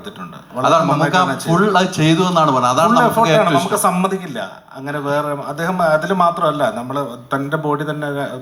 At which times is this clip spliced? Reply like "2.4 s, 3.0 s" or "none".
none